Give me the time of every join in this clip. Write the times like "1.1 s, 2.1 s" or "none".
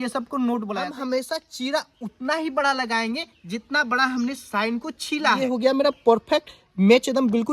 0.9 s, 5.4 s